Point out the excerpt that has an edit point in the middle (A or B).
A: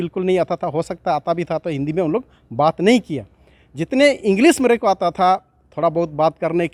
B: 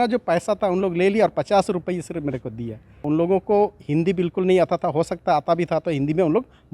B